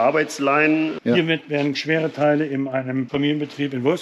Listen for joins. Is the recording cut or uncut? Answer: cut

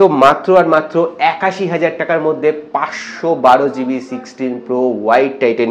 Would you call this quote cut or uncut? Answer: uncut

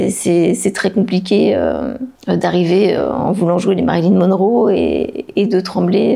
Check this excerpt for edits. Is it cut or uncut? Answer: uncut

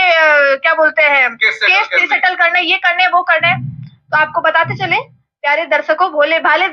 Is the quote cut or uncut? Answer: uncut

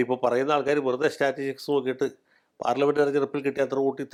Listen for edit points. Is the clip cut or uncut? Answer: uncut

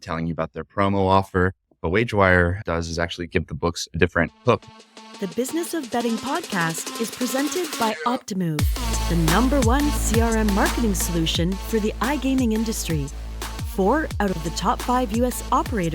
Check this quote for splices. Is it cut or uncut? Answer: cut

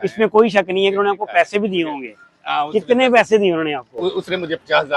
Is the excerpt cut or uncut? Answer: uncut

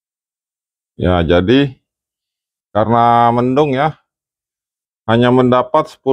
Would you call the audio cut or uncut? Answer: uncut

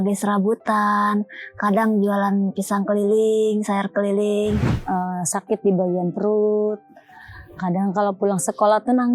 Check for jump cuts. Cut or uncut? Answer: cut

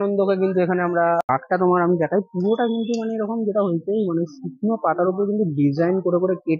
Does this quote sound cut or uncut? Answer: cut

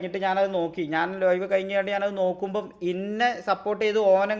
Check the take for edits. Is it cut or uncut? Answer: uncut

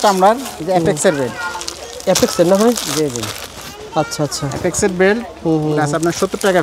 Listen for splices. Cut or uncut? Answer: uncut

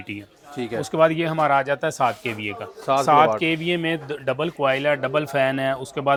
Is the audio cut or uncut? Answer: uncut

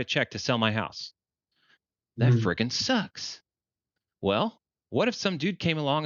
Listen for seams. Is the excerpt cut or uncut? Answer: uncut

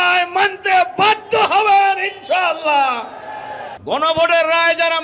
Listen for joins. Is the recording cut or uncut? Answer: cut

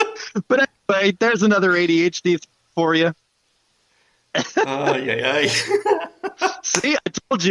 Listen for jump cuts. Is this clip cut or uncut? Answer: uncut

